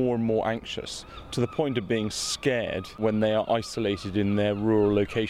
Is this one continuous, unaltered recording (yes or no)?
no